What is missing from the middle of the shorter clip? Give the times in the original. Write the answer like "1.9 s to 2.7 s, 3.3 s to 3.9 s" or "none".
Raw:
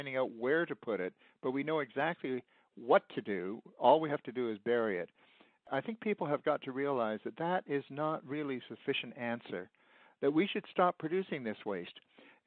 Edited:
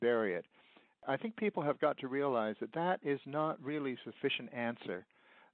none